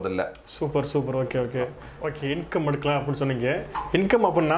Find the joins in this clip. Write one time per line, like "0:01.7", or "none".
0:01.8